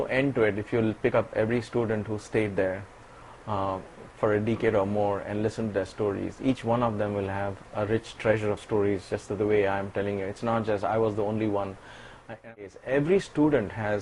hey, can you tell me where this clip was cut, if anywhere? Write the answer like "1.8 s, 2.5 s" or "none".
12.4 s